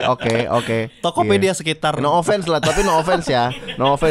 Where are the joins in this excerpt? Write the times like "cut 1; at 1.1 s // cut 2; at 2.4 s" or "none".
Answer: none